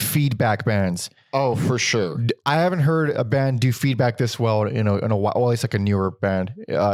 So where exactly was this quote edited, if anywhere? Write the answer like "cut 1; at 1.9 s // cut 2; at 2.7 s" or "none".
none